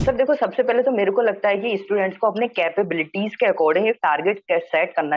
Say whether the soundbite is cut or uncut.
uncut